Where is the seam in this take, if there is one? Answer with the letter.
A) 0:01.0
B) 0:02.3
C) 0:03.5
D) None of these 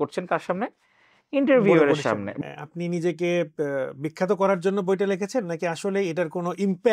B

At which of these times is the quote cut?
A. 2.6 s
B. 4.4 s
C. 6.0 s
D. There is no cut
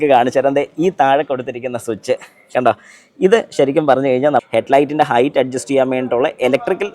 B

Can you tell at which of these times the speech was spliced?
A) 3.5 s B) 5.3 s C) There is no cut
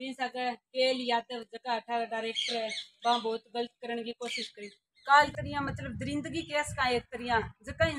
B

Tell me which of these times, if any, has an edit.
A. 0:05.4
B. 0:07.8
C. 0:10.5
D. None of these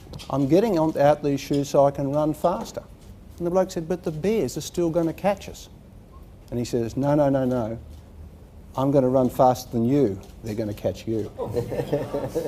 B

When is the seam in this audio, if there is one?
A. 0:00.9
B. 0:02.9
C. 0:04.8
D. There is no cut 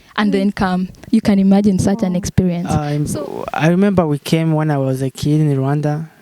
B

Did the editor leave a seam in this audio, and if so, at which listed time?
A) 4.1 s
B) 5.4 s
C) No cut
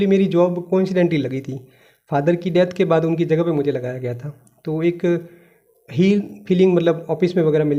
C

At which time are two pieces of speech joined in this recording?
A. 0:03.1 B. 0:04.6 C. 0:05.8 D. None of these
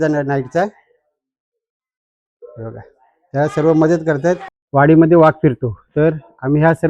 B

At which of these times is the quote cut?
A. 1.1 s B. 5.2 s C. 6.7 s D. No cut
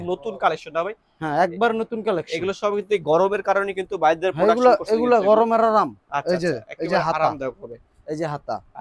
D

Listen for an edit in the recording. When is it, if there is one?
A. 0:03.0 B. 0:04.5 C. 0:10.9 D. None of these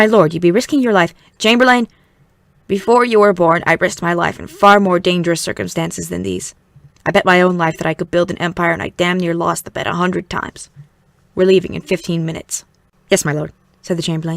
A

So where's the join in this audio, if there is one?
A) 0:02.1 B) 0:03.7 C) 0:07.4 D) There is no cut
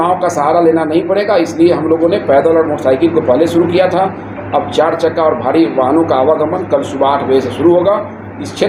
D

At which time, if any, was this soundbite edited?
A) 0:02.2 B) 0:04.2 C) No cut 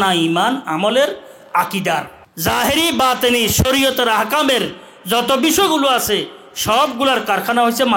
A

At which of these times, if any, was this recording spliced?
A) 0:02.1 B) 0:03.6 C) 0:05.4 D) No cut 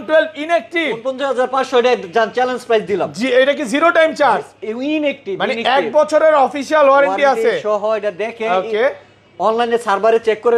D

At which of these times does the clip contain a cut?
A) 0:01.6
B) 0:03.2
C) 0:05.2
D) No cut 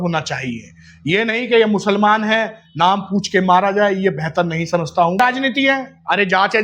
C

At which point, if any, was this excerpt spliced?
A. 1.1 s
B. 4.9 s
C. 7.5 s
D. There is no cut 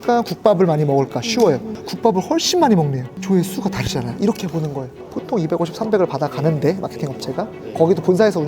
B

